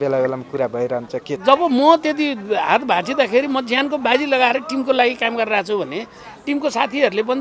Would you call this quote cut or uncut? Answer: cut